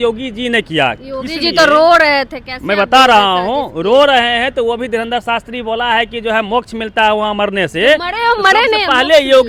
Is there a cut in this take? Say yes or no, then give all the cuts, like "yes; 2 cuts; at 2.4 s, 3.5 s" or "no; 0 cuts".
no; 0 cuts